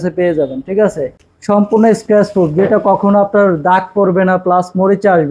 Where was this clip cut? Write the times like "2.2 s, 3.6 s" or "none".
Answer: 1.1 s